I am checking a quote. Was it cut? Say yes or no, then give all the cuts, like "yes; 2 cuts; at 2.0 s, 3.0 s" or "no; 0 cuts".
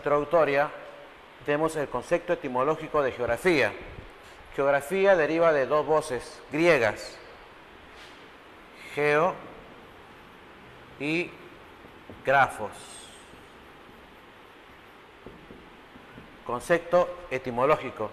no; 0 cuts